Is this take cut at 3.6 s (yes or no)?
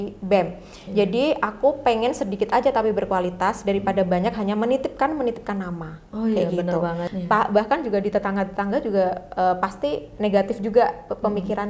no